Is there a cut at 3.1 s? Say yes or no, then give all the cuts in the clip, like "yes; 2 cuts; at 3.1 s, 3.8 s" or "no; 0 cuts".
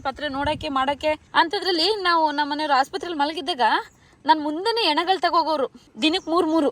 no; 2 cuts; at 1.2 s, 5.8 s